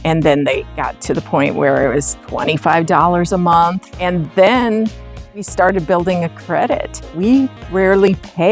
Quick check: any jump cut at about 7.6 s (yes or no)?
yes